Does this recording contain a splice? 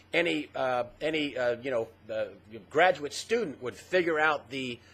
yes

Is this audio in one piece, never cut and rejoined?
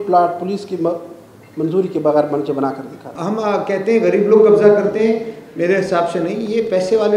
no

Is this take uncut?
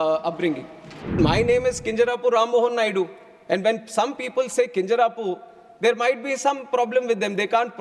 no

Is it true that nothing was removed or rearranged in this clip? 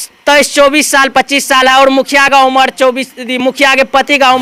yes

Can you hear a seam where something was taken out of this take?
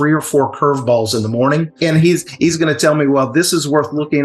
yes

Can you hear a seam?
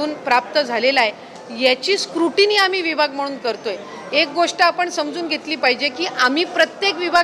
no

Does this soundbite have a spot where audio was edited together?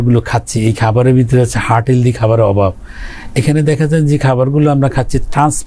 no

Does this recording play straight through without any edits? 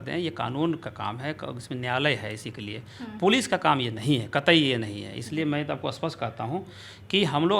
yes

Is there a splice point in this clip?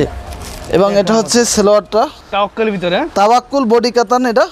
yes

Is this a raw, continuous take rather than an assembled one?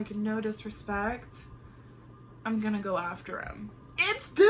yes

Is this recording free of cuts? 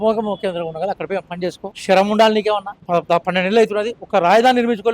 no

